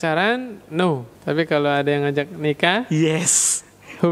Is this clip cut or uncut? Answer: cut